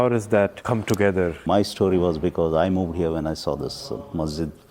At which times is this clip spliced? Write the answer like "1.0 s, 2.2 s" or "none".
1.4 s